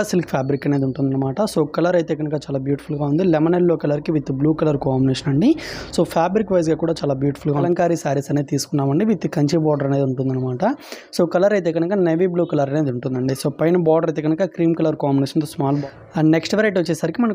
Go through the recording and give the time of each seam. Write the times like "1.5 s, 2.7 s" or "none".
7.6 s, 15.8 s